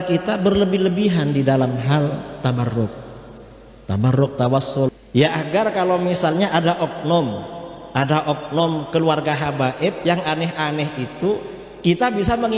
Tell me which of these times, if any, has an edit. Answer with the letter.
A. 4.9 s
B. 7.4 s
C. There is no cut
A